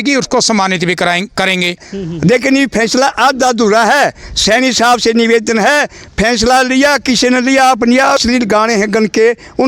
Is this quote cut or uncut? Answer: cut